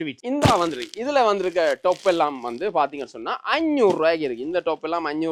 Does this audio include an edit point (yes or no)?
no